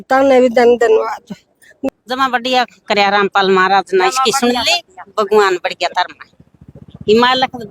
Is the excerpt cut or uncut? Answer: cut